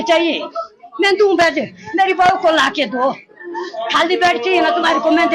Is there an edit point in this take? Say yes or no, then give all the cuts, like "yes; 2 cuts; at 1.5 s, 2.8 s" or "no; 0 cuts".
no; 0 cuts